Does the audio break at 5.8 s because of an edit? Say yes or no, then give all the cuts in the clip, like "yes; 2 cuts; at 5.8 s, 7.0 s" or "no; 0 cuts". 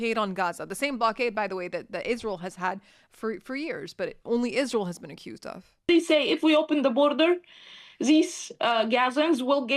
yes; 1 cut; at 5.8 s